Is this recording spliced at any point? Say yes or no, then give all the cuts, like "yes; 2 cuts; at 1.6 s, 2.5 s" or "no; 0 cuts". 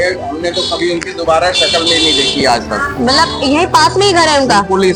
no; 0 cuts